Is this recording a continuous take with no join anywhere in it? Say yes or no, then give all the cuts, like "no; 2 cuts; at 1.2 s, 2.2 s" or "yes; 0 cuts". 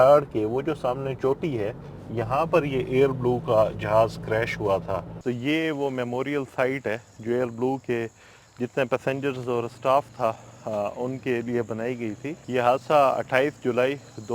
no; 1 cut; at 5.1 s